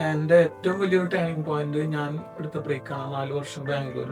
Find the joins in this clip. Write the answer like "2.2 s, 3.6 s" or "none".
none